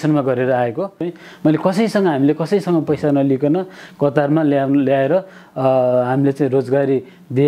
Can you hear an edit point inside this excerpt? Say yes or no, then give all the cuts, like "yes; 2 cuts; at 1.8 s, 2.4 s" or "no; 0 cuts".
yes; 1 cut; at 1.1 s